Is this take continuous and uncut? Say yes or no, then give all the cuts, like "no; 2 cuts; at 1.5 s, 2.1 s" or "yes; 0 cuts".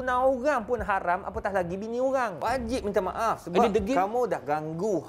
no; 1 cut; at 2.4 s